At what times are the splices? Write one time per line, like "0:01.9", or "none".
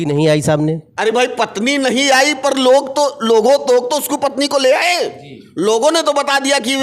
none